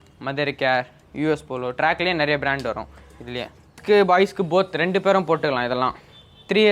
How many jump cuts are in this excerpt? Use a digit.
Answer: 1